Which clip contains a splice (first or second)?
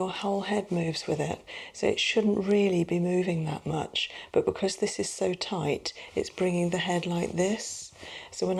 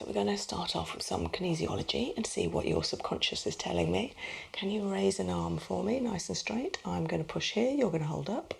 second